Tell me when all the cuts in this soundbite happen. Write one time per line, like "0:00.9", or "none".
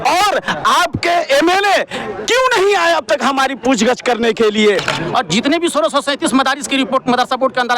0:04.9

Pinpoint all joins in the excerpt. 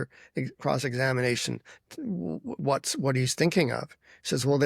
none

